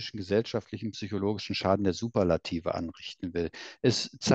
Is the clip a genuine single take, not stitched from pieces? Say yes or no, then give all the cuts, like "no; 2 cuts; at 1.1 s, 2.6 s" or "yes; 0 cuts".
yes; 0 cuts